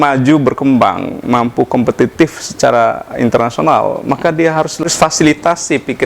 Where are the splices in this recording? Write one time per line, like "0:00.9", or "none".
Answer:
0:04.8